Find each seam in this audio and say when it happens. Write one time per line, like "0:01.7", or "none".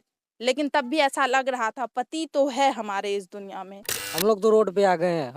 0:04.0